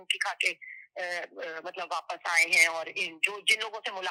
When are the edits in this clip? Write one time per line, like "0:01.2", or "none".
none